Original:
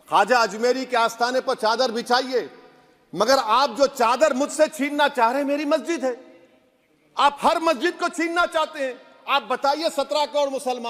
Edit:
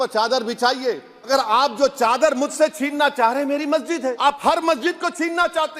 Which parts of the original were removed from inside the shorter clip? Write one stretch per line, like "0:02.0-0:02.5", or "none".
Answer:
0:02.8-0:03.3
0:06.2-0:07.2